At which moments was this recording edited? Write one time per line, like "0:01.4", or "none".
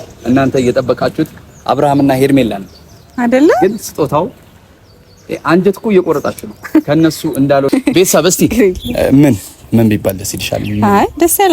0:07.7

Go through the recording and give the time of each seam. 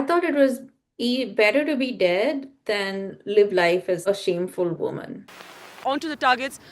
0:04.0
0:05.7

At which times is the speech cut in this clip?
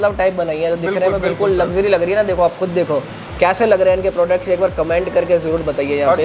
none

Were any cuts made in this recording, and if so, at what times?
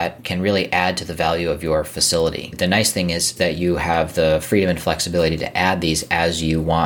0:02.5

